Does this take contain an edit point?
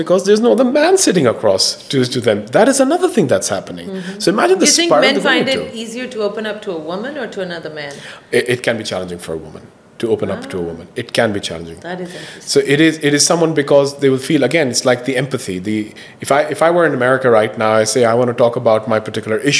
no; 0 cuts

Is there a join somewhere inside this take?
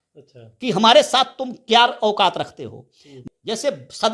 yes; 1 cut; at 3.2 s

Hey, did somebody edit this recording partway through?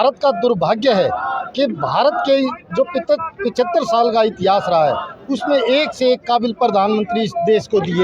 no; 0 cuts

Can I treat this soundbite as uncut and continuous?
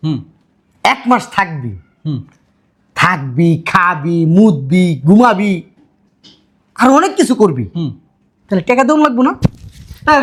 yes; 0 cuts

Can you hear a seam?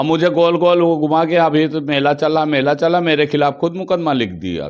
no; 0 cuts

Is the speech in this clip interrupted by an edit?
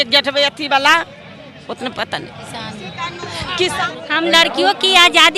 yes; 1 cut; at 3.9 s

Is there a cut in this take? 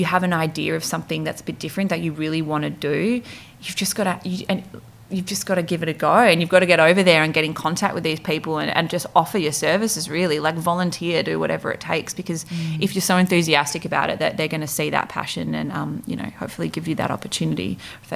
no; 0 cuts

